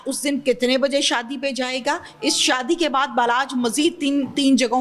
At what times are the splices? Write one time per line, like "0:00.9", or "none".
none

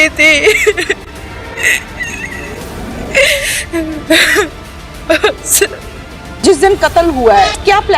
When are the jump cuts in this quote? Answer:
0:06.4

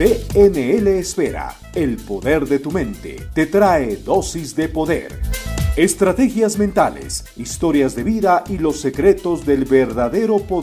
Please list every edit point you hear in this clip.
none

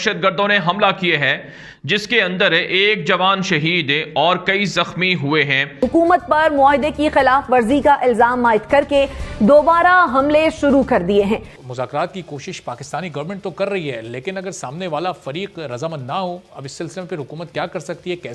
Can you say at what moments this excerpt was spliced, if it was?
0:05.7
0:11.5

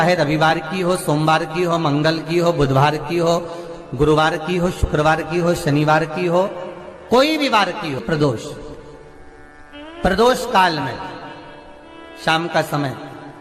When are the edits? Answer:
0:08.0

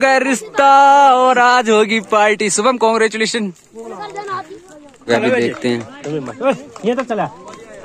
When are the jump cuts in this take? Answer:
0:05.1

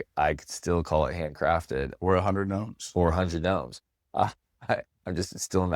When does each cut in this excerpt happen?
0:04.5

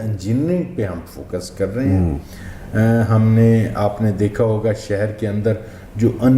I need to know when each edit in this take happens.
none

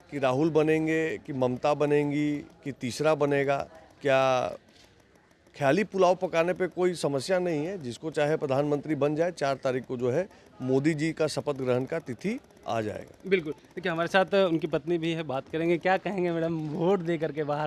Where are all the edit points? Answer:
none

